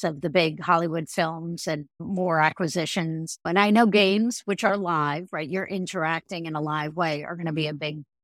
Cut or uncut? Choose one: cut